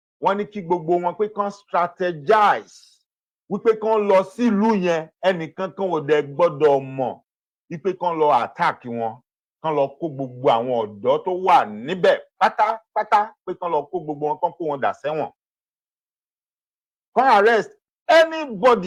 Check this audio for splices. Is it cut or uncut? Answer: uncut